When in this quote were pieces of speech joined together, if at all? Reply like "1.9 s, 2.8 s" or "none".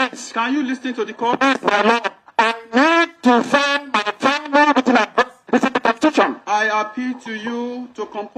none

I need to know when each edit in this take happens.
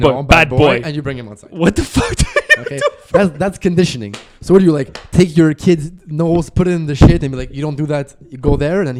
none

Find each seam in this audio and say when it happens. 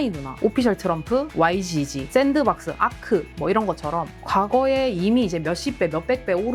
none

